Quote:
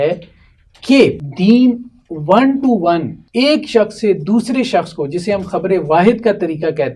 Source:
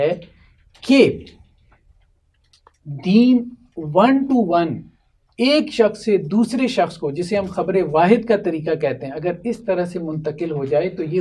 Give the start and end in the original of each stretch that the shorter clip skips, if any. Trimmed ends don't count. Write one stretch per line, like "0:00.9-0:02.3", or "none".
0:01.3-0:02.9
0:04.8-0:05.2